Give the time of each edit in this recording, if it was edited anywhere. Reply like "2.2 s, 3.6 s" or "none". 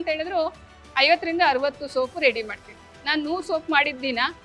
2.9 s